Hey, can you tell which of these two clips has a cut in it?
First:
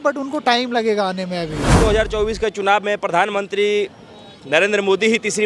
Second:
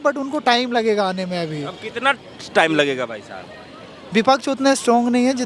first; 1 cut; at 1.8 s

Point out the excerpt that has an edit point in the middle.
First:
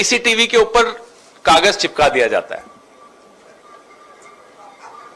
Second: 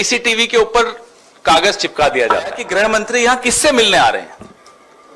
second; 1 cut; at 2.6 s

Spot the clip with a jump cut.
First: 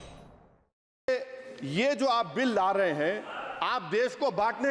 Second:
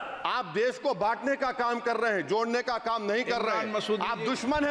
first; 1 cut; at 1.1 s

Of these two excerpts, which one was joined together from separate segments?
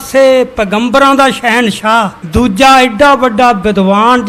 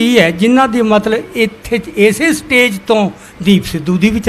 first; 1 cut; at 2.2 s

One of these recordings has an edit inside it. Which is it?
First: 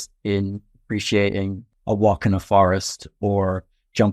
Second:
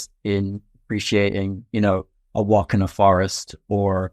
first; 1 cut; at 1.6 s

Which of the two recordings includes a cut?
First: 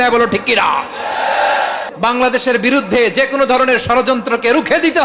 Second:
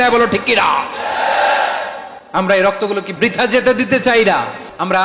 first; 1 cut; at 1.9 s

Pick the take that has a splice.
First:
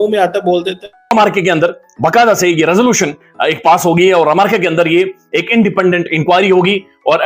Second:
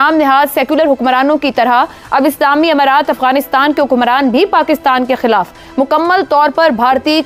first; 1 cut; at 1.1 s

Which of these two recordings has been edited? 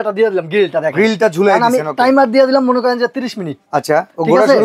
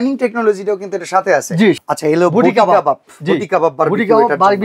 second; 1 cut; at 1.8 s

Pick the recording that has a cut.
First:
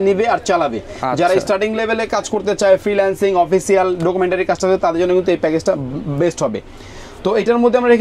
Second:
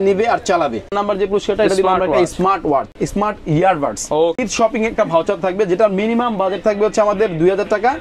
second; 3 cuts; at 0.9 s, 3.0 s, 4.4 s

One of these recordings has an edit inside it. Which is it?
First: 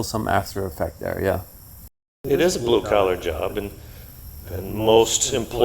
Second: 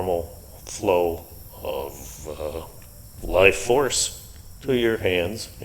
first; 1 cut; at 2.1 s

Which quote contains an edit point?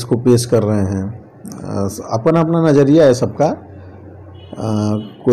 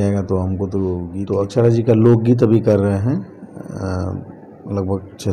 second; 1 cut; at 1.1 s

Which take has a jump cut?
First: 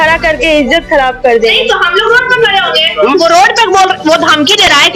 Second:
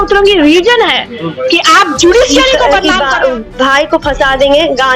second; 1 cut; at 2.7 s

